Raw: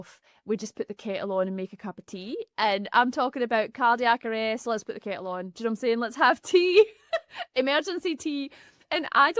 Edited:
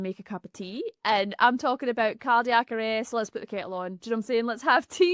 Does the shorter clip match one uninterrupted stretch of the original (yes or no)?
yes